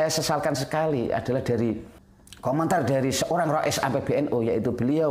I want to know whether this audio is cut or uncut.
uncut